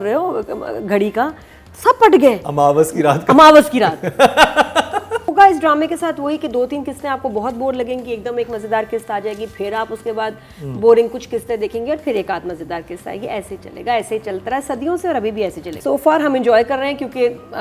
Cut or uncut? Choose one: cut